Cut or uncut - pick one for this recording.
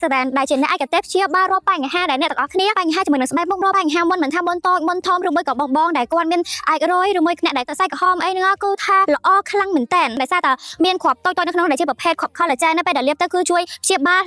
uncut